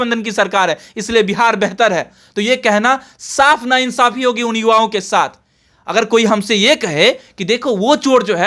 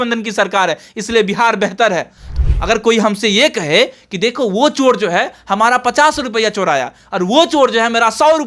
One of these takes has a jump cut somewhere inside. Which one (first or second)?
second